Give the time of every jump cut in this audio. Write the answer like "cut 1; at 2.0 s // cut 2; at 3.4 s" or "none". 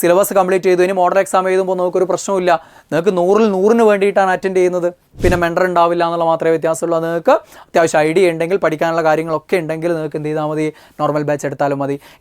cut 1; at 5.1 s